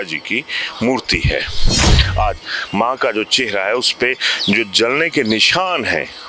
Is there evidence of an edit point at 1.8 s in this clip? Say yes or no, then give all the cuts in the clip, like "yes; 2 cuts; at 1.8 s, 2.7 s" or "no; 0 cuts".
yes; 1 cut; at 1.8 s